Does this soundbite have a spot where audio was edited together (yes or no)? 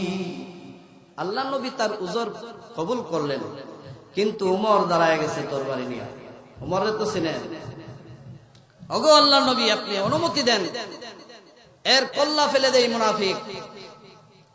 no